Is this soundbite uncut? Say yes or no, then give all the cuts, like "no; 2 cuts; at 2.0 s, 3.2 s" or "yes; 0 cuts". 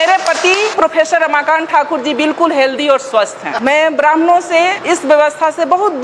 yes; 0 cuts